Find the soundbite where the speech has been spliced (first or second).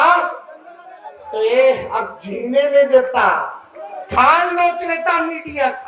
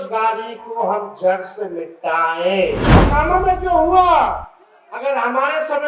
second